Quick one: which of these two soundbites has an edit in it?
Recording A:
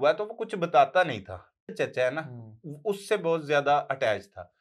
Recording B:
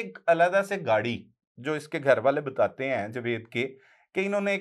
A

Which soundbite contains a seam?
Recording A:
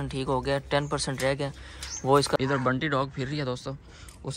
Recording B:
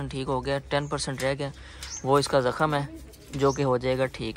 A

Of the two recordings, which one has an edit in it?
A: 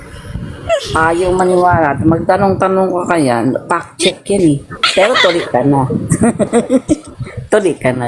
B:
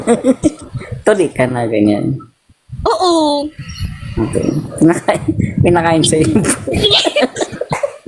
A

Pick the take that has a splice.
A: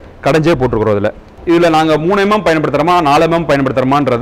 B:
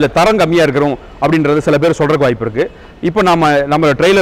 A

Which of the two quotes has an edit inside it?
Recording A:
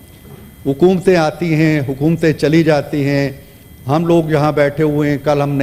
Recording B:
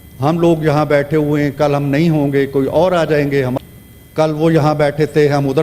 B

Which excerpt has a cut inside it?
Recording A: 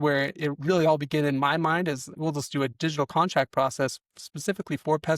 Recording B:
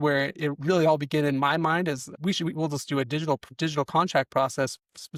A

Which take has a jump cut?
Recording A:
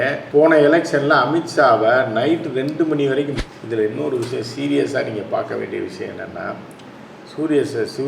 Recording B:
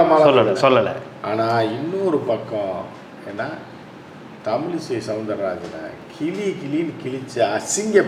A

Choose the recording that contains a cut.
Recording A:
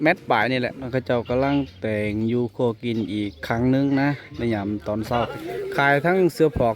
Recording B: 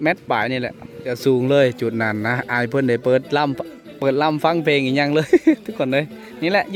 A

